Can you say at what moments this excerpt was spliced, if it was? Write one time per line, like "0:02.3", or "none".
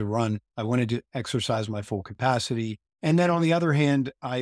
0:01.1
0:02.8